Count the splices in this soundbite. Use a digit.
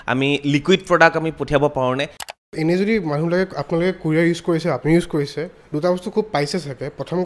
1